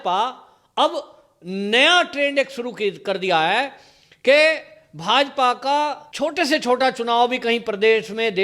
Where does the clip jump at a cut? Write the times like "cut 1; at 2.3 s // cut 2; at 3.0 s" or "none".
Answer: cut 1; at 6.0 s